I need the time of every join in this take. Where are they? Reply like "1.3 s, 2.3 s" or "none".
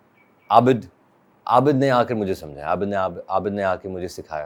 none